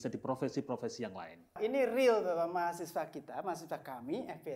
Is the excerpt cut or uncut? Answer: cut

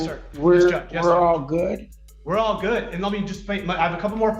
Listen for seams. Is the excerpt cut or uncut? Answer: uncut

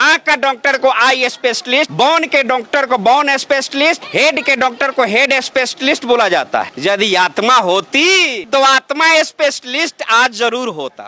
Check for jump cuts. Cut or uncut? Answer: uncut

